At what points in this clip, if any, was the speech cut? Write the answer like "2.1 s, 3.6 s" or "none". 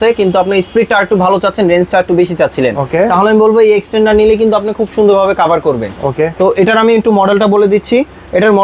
none